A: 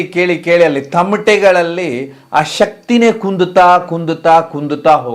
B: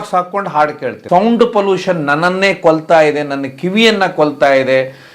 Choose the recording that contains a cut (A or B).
B